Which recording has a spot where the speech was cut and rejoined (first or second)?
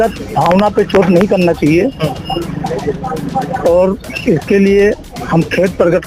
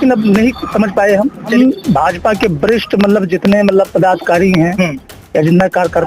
second